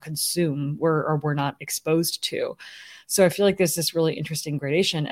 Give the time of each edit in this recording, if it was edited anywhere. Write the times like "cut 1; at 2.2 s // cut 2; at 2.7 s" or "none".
none

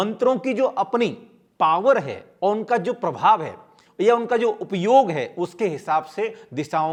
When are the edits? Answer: none

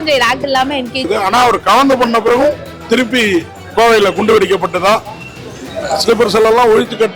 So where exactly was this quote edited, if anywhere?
cut 1; at 1.1 s

